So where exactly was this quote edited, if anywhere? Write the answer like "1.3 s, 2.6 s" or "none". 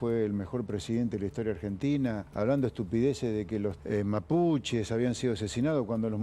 2.2 s, 3.8 s